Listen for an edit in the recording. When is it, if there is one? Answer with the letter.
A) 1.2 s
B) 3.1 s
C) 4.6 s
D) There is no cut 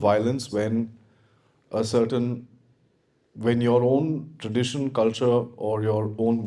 D